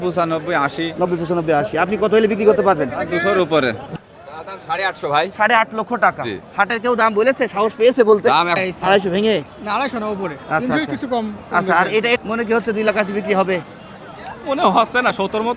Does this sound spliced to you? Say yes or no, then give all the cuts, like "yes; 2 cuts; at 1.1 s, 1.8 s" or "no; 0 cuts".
yes; 3 cuts; at 4.0 s, 8.6 s, 12.2 s